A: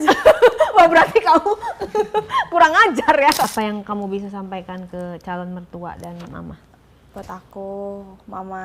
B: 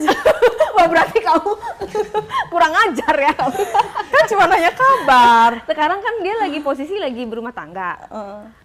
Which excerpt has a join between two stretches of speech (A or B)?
A